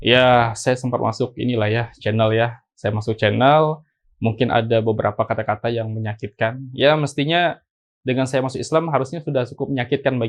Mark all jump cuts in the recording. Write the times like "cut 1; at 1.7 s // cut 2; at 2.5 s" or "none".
none